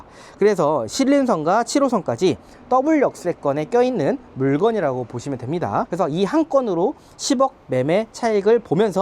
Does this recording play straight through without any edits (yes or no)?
no